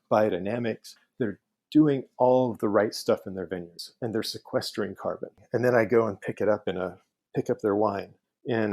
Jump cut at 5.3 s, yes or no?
yes